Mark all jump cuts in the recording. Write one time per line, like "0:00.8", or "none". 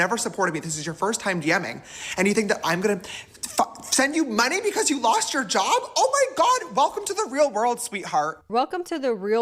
none